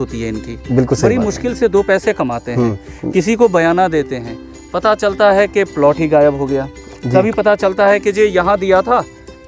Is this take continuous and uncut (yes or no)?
yes